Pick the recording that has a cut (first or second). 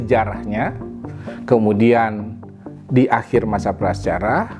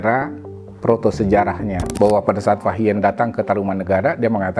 second